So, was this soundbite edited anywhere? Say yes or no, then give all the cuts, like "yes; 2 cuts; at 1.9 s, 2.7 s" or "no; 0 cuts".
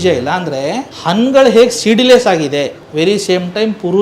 yes; 2 cuts; at 0.9 s, 2.8 s